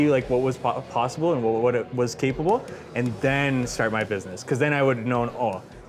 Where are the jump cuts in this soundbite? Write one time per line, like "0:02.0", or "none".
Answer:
none